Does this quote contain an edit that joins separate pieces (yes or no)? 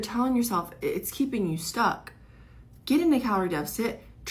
no